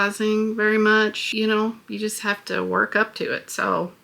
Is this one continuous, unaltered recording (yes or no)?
no